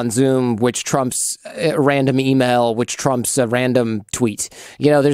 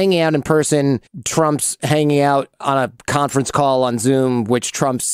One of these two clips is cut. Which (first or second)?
second